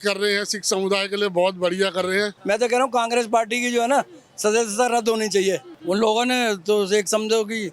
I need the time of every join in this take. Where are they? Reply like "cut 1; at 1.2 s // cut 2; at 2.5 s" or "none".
cut 1; at 2.4 s // cut 2; at 5.7 s